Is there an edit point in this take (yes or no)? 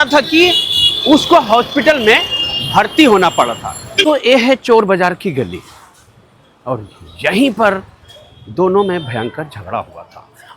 yes